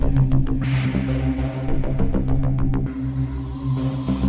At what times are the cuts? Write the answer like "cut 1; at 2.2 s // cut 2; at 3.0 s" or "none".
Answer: none